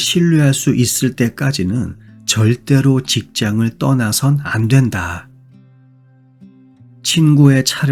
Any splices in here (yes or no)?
no